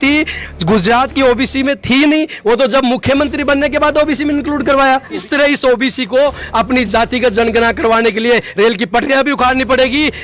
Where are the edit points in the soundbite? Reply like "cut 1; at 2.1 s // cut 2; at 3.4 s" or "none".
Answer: cut 1; at 5.3 s